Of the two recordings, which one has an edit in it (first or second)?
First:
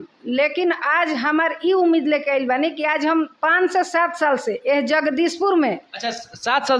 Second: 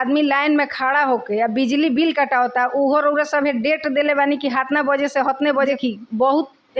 second